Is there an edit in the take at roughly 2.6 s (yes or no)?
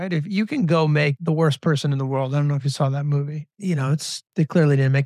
no